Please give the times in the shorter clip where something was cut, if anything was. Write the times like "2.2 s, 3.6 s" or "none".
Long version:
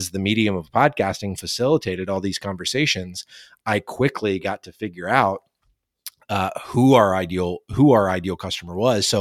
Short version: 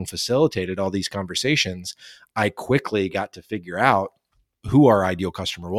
4.6 s